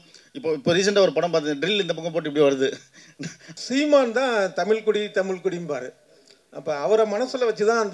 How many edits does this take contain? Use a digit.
1